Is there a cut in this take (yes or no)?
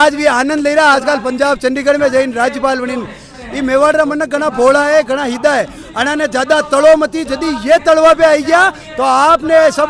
yes